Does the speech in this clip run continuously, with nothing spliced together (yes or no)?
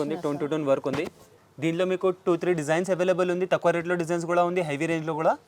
yes